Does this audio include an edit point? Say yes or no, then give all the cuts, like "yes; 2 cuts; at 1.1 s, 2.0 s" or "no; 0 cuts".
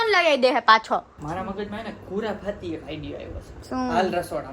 yes; 2 cuts; at 1.1 s, 3.5 s